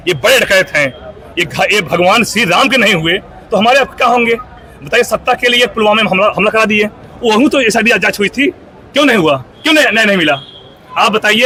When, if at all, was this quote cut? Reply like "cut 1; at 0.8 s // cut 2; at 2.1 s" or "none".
none

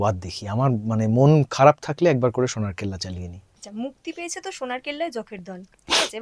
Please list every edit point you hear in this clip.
none

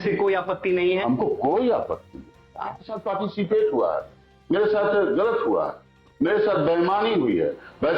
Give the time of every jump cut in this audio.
cut 1; at 3.1 s

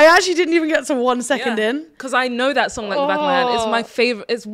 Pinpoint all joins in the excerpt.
none

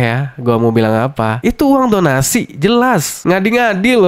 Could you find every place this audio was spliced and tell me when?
none

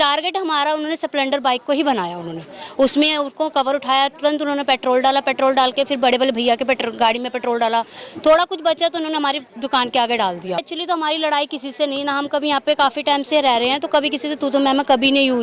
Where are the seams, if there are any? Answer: cut 1; at 10.7 s

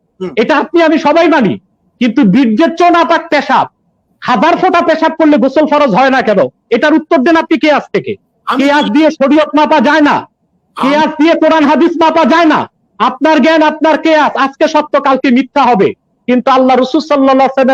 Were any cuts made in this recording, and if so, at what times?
none

